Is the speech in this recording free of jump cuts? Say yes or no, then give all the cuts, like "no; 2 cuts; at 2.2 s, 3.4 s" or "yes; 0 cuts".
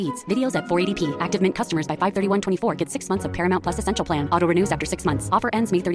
yes; 0 cuts